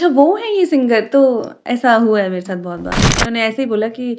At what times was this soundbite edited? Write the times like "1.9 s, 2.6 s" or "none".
3.3 s